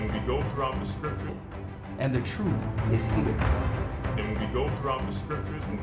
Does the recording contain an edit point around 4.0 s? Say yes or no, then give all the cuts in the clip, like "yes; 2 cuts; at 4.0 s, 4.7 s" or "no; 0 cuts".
no; 1 cut; at 1.3 s